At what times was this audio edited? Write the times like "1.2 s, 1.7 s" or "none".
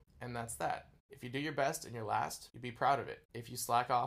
1.1 s